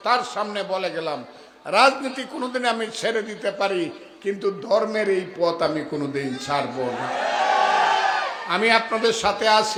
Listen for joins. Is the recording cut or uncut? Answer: uncut